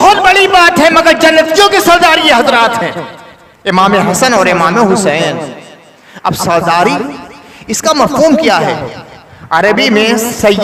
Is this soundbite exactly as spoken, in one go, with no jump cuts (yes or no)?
yes